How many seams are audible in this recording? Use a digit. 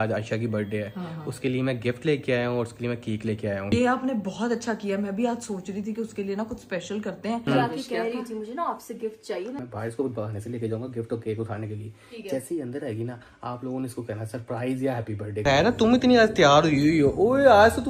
4